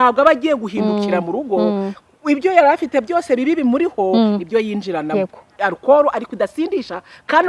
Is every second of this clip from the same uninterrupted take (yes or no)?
no